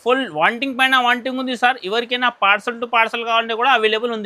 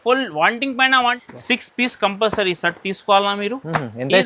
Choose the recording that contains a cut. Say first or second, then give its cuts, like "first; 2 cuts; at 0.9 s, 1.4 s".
second; 1 cut; at 1.2 s